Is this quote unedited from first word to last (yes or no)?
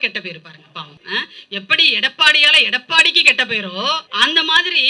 no